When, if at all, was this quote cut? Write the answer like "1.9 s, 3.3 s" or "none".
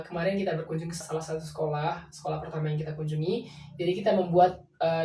1.0 s